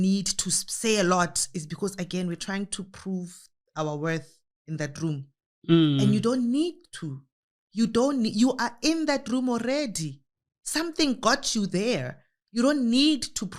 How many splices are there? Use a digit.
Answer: 0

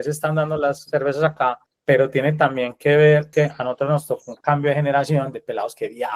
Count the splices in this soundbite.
2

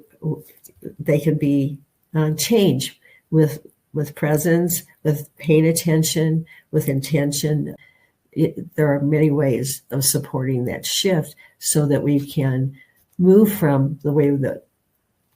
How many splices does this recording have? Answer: 1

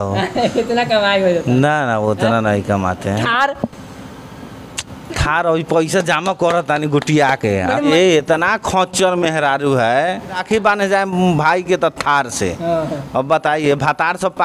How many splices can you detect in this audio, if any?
2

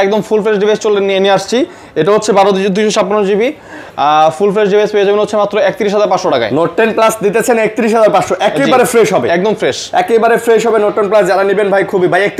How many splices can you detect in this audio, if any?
0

